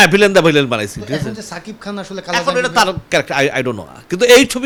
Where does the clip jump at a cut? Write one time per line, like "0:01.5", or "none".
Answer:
none